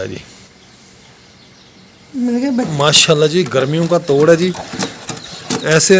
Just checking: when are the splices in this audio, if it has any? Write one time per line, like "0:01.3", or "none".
0:02.7